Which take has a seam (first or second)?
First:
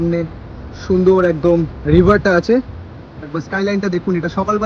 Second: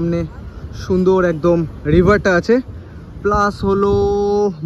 first